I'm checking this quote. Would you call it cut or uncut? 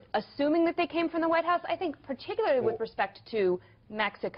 uncut